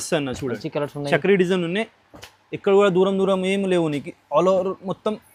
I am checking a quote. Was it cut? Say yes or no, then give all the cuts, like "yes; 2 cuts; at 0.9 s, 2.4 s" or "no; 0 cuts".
no; 0 cuts